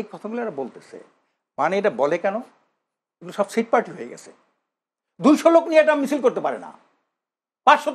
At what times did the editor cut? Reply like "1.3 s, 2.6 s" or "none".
none